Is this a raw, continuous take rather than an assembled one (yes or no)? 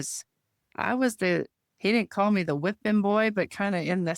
no